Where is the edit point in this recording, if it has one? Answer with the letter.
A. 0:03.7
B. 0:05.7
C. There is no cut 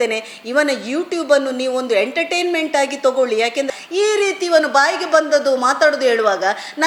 A